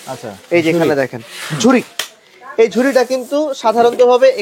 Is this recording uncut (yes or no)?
yes